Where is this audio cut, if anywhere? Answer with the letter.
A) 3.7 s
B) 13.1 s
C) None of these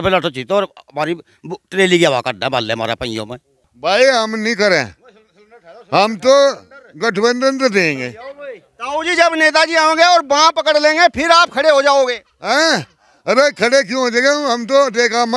A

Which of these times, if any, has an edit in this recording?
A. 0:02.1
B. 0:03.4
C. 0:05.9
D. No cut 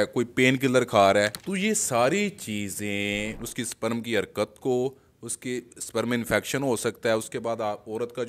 B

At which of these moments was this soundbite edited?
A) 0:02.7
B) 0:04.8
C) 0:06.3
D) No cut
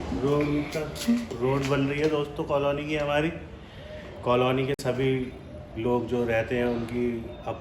D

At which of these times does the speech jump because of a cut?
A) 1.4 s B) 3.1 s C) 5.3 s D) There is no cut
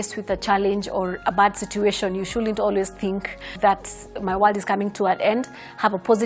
D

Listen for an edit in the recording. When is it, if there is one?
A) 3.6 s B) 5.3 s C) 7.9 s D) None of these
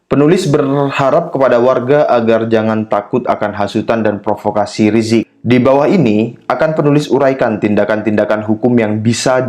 B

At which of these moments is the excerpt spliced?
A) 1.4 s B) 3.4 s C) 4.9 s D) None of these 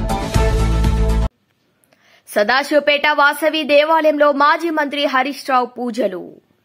A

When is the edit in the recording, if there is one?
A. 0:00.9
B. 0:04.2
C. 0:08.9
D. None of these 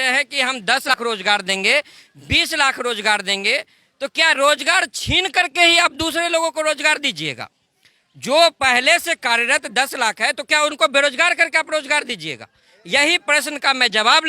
A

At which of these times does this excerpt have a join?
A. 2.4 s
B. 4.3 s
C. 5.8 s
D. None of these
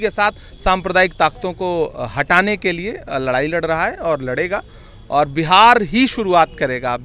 D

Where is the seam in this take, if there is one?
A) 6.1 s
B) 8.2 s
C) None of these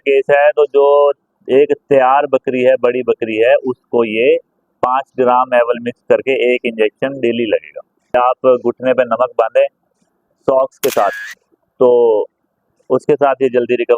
B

